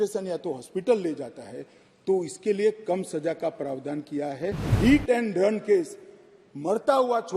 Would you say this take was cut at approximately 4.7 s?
yes; 1 cut; at 4.7 s

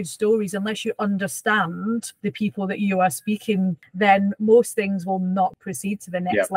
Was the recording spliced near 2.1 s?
yes; 3 cuts; at 2.1 s, 3.8 s, 5.6 s

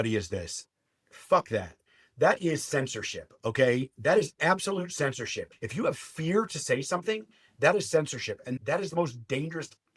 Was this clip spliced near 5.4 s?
yes; 2 cuts; at 5.4 s, 8.9 s

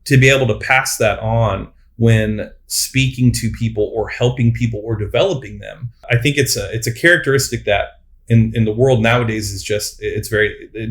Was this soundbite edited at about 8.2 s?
no; 1 cut; at 6.0 s

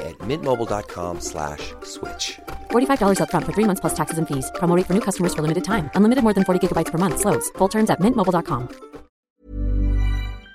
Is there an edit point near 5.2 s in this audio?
no; 1 cut; at 9.4 s

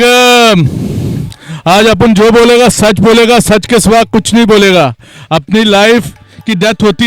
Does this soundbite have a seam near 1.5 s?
no; 0 cuts

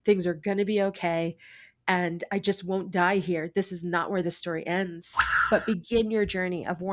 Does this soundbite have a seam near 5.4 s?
yes; 1 cut; at 5.4 s

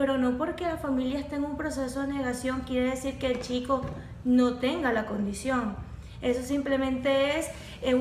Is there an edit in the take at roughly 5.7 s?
no; 0 cuts

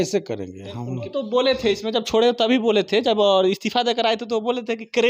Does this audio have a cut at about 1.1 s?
yes; 1 cut; at 1.1 s

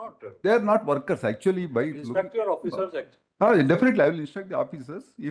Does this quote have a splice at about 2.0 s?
yes; 1 cut; at 2.0 s

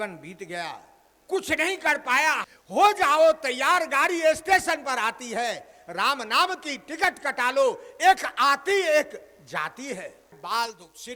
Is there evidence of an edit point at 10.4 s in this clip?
yes; 2 cuts; at 2.4 s, 10.4 s

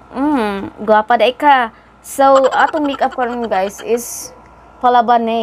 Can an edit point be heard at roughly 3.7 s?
no; 0 cuts

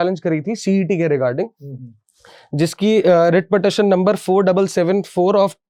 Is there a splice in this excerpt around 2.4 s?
no; 0 cuts

